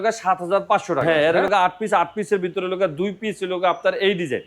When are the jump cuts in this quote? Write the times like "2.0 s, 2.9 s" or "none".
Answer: 1.0 s